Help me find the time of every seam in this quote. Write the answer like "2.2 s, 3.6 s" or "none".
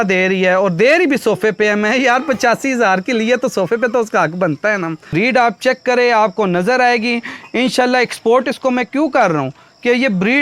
5.0 s